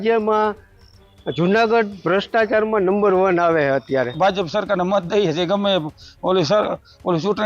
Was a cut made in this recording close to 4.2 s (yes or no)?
yes